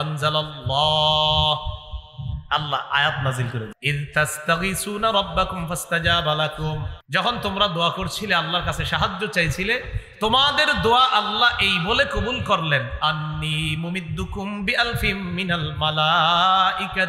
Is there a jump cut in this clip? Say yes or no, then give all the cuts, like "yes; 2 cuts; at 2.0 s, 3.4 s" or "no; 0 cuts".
yes; 2 cuts; at 3.7 s, 6.9 s